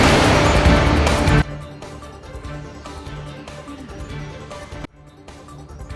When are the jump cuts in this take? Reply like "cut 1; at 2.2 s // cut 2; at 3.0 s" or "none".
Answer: cut 1; at 1.3 s